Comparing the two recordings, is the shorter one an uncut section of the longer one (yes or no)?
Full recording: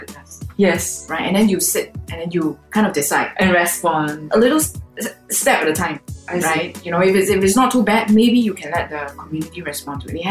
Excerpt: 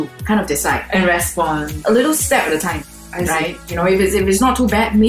no